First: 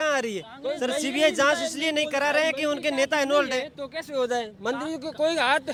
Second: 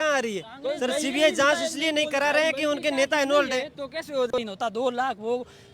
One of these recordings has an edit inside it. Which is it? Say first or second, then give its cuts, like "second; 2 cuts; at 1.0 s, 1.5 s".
second; 1 cut; at 4.3 s